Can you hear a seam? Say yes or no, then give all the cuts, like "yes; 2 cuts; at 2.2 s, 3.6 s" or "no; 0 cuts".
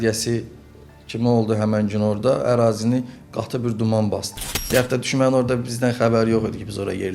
yes; 1 cut; at 4.6 s